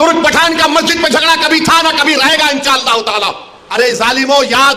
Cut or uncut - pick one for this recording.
cut